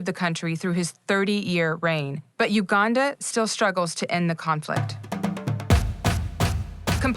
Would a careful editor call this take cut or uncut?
cut